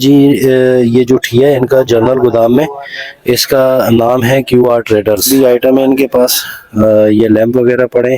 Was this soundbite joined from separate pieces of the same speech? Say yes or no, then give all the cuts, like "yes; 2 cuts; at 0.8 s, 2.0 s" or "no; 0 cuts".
yes; 1 cut; at 5.3 s